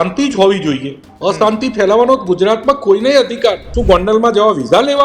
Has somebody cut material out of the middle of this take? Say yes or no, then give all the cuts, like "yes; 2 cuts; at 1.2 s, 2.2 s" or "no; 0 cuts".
yes; 1 cut; at 3.7 s